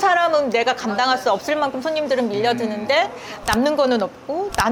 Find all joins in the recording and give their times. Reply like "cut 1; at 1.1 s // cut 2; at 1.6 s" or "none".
none